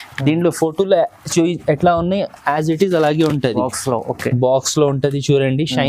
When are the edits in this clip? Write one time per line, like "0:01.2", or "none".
none

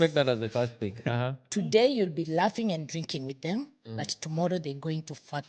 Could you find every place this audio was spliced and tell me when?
0:01.4

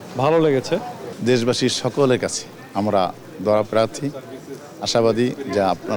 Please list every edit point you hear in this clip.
none

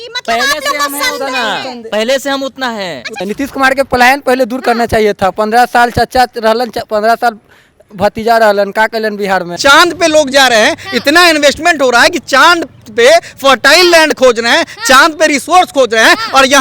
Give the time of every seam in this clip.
0:03.2
0:09.5

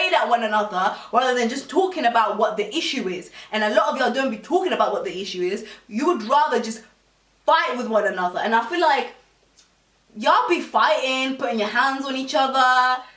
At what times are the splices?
none

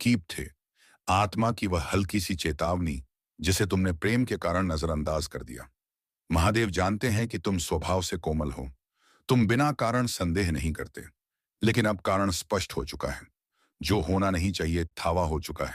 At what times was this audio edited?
none

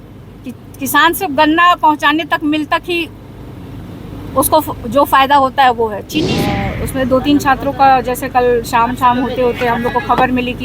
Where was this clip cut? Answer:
0:06.4

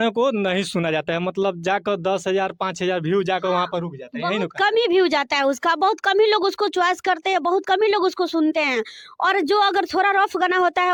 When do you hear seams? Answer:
none

